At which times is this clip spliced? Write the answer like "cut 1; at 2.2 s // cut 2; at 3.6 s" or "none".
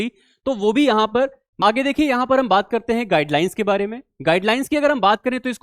cut 1; at 1.6 s